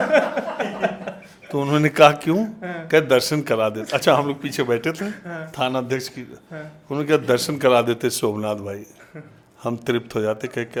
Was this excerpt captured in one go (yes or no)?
yes